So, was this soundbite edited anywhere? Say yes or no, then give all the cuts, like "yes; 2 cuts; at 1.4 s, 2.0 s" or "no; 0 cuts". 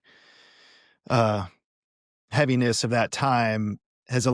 no; 0 cuts